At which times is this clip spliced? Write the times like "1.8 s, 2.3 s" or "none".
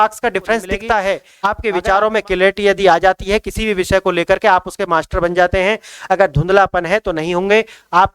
1.3 s